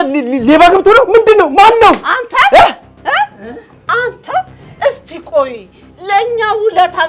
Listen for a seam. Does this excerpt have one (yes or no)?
no